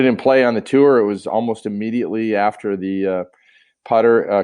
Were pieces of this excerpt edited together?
no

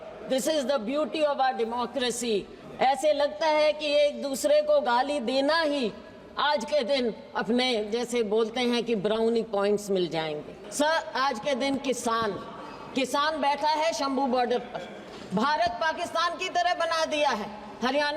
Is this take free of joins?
no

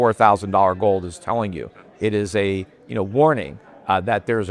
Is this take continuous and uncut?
yes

